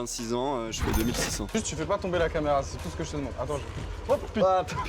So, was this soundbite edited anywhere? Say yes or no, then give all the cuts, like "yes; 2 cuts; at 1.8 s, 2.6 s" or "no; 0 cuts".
yes; 1 cut; at 1.5 s